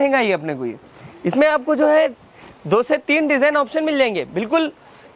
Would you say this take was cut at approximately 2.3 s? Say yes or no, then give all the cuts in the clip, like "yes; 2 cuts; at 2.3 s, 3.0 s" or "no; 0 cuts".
no; 0 cuts